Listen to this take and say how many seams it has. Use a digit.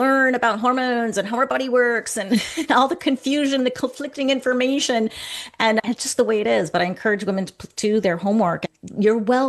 0